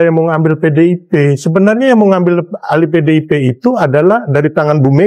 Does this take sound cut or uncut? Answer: uncut